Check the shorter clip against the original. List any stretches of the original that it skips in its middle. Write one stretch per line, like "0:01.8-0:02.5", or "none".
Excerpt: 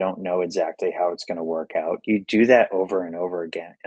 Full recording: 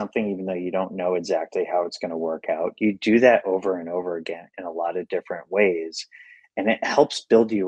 none

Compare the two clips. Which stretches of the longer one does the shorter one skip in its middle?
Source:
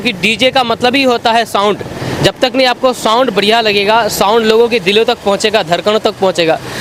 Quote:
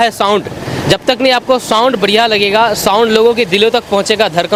none

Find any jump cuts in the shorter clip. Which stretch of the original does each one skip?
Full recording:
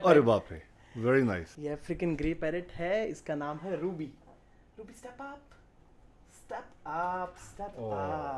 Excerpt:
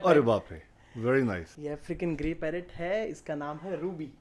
none

